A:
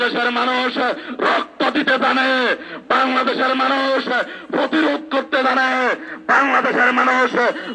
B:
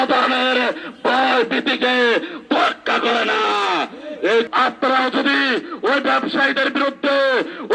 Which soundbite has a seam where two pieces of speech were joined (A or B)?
B